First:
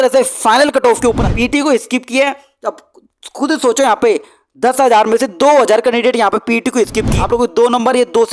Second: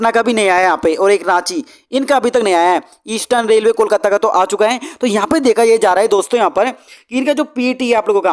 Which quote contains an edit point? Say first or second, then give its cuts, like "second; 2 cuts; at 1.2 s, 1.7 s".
first; 2 cuts; at 1.2 s, 7.1 s